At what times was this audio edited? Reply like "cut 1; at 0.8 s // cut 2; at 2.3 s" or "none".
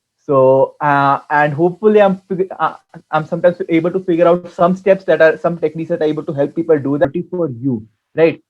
cut 1; at 7.0 s